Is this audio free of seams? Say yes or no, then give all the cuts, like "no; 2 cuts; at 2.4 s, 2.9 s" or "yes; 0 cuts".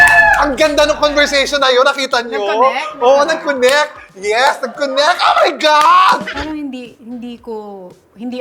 no; 1 cut; at 6.3 s